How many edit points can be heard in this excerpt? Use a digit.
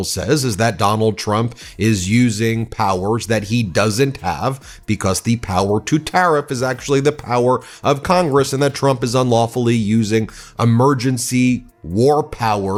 0